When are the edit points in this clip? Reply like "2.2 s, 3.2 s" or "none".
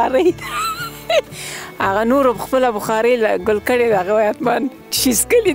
1.3 s